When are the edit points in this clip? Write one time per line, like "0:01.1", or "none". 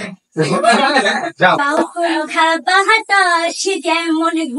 0:01.6

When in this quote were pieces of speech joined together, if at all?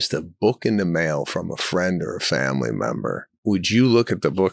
0:03.3

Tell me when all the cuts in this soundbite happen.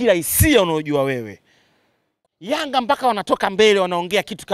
0:02.0

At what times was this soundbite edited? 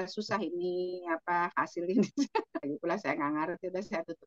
0:02.6

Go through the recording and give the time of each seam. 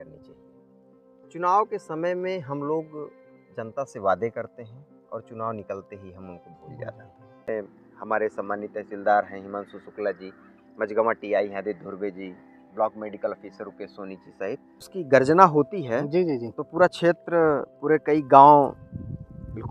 0:07.5
0:14.9

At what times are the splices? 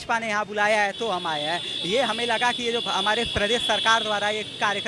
none

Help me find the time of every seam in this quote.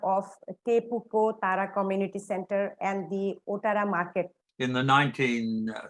0:04.4

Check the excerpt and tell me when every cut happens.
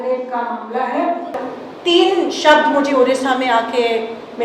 0:01.4

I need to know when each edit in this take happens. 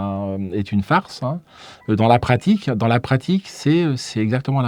none

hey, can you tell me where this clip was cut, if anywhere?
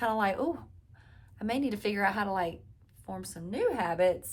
none

